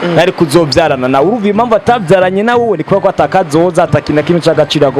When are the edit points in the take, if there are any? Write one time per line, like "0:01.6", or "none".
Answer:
none